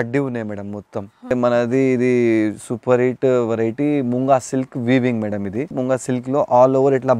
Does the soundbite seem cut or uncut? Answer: cut